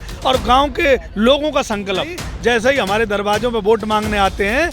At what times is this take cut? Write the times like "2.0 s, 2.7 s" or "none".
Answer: 2.2 s